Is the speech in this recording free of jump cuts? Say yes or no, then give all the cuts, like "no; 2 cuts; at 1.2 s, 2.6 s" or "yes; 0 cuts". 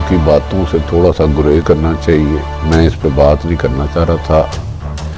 no; 1 cut; at 1.6 s